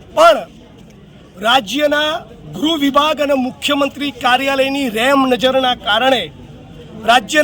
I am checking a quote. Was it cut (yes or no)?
no